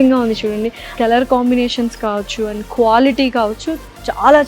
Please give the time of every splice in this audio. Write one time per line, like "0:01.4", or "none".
0:01.0